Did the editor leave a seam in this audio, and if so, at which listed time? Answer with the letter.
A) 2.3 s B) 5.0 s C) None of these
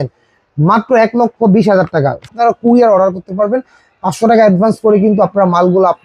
A